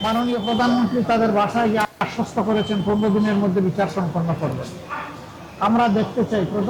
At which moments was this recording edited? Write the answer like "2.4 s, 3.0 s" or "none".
none